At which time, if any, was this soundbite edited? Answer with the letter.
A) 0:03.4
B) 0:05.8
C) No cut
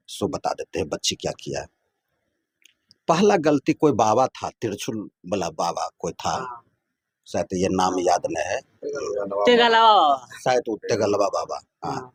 C